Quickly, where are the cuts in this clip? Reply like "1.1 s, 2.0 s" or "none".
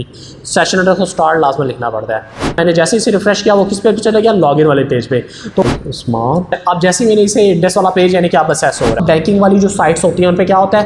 2.6 s, 5.6 s, 9.0 s

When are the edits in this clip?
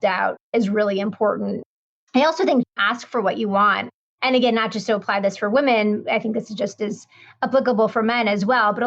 1.8 s

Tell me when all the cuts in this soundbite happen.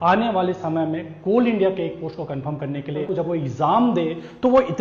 3.0 s

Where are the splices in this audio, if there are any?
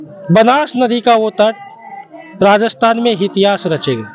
none

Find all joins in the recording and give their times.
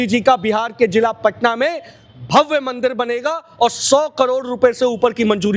none

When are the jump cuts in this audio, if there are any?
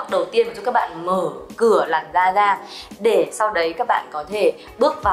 none

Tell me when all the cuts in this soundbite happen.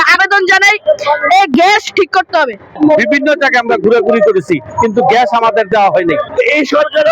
2.8 s, 6.3 s

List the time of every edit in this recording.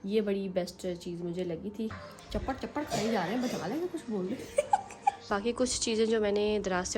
2.0 s, 5.3 s

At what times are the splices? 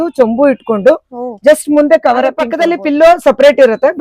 2.5 s

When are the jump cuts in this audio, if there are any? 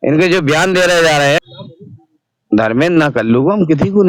1.5 s

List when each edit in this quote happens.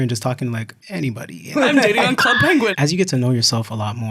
1.5 s, 2.7 s

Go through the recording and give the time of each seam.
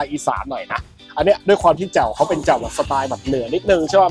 none

